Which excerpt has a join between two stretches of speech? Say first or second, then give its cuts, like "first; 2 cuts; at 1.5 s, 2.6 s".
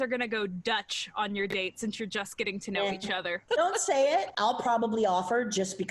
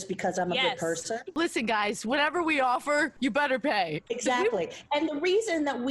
second; 2 cuts; at 1.3 s, 4.0 s